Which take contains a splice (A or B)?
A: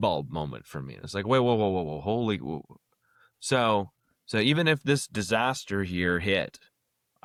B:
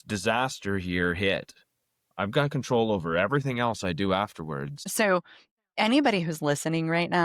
B